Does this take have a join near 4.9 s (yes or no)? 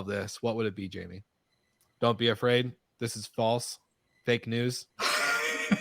yes